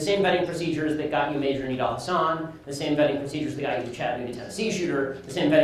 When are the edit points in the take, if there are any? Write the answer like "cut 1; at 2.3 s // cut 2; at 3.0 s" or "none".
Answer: none